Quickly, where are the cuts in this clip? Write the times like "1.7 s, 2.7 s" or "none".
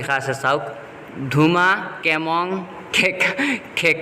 1.9 s, 2.8 s